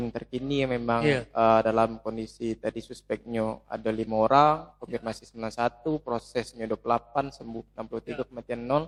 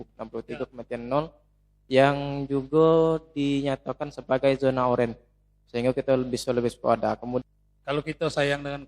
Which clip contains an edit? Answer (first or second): second